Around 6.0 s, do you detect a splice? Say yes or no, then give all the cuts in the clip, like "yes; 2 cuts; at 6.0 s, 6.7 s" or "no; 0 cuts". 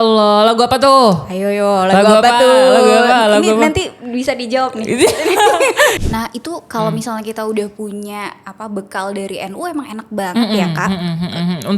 yes; 1 cut; at 6.0 s